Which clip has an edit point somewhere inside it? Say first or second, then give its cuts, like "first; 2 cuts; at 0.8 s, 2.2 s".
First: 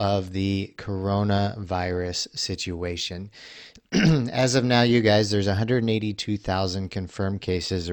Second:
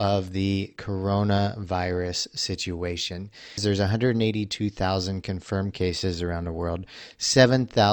second; 1 cut; at 3.6 s